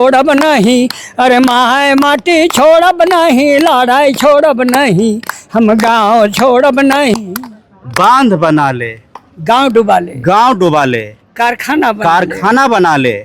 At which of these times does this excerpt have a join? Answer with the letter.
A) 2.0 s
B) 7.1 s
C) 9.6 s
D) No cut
B